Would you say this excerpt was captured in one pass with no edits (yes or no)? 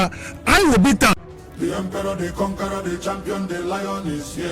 no